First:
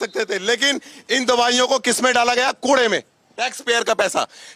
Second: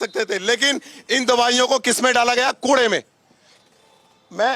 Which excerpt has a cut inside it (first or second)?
first